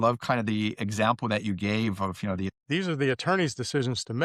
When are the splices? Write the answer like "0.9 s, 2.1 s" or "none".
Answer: 2.5 s